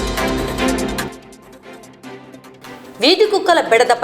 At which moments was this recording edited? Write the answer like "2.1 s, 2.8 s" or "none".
1.0 s